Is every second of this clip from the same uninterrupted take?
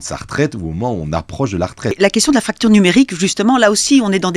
no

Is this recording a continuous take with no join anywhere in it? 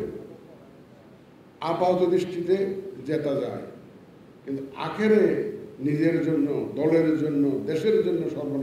yes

